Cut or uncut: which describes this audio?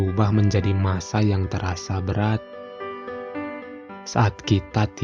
uncut